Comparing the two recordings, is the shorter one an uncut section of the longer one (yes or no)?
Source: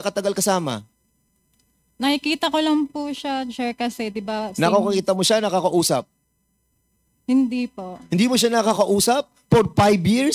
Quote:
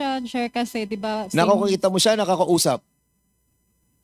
yes